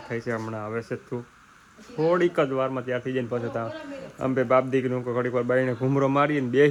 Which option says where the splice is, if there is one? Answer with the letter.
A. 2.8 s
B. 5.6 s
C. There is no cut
C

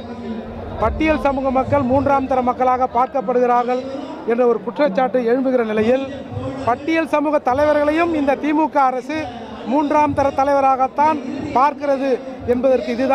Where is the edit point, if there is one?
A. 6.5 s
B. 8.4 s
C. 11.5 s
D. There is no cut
D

